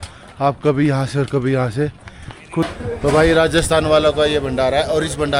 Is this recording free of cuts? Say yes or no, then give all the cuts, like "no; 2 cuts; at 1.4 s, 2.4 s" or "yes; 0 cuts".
no; 1 cut; at 2.7 s